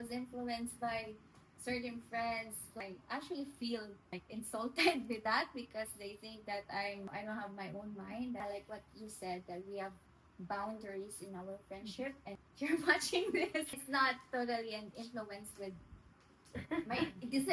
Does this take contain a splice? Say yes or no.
yes